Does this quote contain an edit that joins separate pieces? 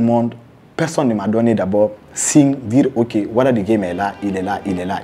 no; 0 cuts

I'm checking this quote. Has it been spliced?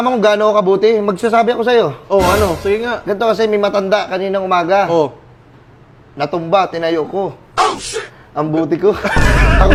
no; 0 cuts

